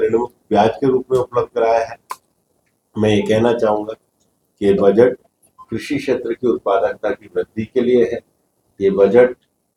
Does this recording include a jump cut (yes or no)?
no